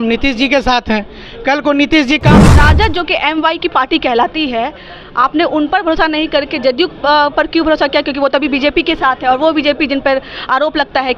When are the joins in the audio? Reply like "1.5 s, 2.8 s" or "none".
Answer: 2.4 s

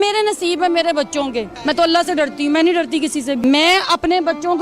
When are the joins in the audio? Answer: 1.5 s, 3.4 s

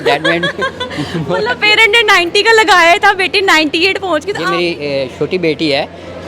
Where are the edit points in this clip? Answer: 4.3 s

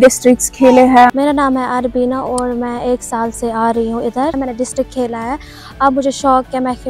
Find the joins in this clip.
1.1 s, 4.4 s

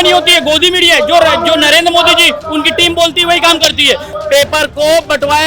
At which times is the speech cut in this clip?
4.1 s

